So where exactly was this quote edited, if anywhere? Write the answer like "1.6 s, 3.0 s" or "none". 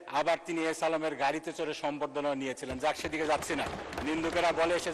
4.0 s